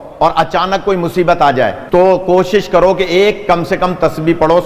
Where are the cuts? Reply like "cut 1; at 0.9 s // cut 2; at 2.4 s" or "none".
cut 1; at 1.8 s